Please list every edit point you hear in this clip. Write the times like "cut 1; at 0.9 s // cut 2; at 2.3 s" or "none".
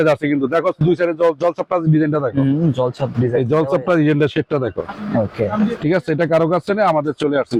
none